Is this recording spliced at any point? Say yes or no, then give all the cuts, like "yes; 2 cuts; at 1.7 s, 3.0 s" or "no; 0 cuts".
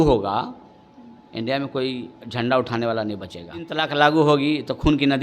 yes; 1 cut; at 3.8 s